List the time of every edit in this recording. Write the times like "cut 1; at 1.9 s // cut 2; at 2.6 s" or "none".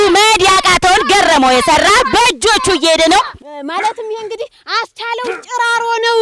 cut 1; at 3.3 s